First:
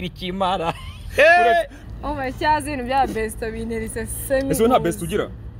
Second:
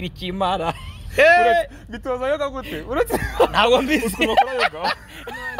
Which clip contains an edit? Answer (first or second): first